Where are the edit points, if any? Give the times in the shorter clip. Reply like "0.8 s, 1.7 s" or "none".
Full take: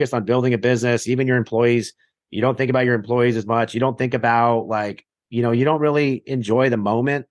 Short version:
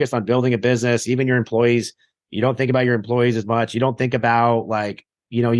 none